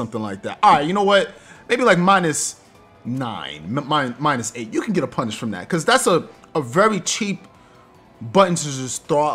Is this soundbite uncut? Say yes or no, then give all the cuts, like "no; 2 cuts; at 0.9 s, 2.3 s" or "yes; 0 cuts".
yes; 0 cuts